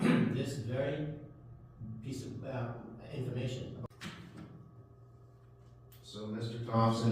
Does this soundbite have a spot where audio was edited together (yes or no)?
yes